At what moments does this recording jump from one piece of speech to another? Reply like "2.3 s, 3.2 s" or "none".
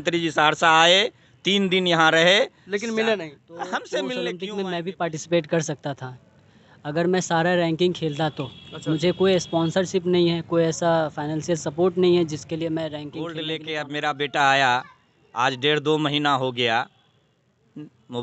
4.3 s, 13.3 s